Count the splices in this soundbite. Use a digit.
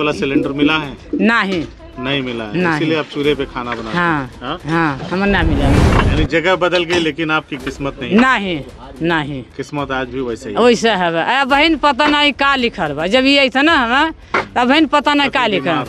1